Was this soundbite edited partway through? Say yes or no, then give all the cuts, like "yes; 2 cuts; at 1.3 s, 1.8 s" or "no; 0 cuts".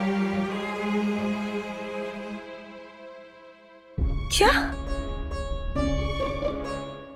no; 0 cuts